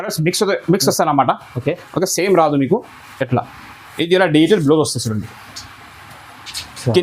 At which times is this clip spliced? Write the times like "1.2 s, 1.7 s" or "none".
none